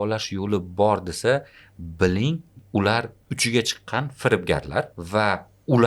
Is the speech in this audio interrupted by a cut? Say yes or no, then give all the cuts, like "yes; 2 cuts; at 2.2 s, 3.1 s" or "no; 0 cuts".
yes; 1 cut; at 5.0 s